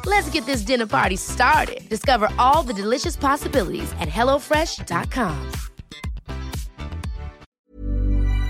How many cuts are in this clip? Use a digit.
1